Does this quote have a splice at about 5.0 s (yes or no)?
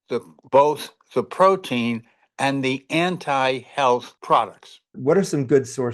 yes